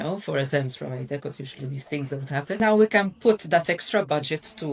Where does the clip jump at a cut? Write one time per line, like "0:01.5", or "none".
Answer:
0:02.6